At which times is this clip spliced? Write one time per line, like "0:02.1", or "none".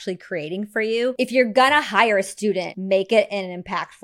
0:01.1
0:02.7